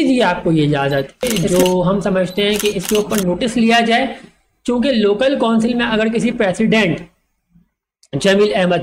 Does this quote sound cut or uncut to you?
cut